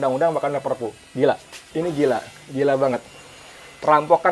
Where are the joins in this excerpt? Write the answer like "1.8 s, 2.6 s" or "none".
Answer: 1.5 s